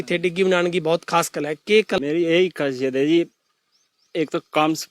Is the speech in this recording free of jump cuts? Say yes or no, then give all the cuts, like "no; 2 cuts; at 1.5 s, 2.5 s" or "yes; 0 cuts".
no; 1 cut; at 2.0 s